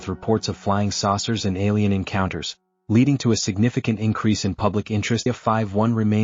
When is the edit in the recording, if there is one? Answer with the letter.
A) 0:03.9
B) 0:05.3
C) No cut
B